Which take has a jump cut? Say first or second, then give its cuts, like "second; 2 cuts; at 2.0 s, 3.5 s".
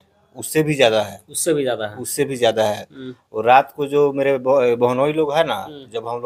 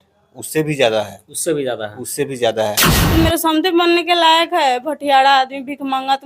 second; 1 cut; at 2.9 s